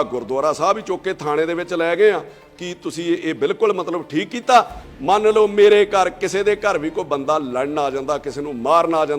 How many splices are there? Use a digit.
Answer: 1